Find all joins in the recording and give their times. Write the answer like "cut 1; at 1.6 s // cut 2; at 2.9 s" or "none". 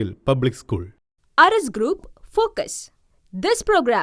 cut 1; at 0.9 s